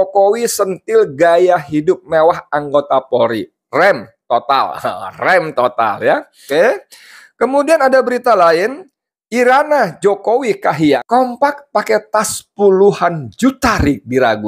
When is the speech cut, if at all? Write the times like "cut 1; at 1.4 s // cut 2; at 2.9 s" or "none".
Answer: cut 1; at 6.5 s // cut 2; at 11.0 s

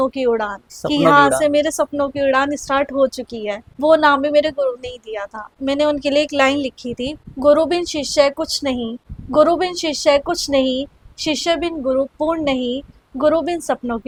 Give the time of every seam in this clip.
none

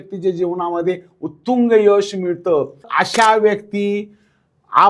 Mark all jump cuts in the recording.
cut 1; at 2.9 s

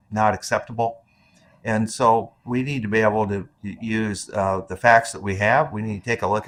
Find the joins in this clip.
none

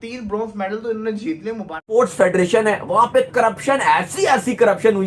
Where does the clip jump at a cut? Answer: cut 1; at 1.8 s

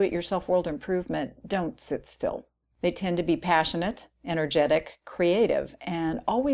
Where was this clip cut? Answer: cut 1; at 5.4 s

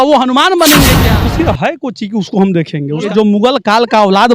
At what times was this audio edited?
cut 1; at 1.1 s // cut 2; at 3.1 s

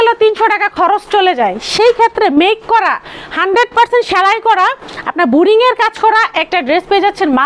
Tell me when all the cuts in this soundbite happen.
none

